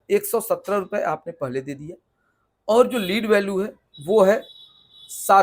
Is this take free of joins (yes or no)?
yes